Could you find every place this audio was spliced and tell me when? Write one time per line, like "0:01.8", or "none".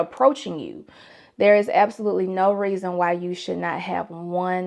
0:01.1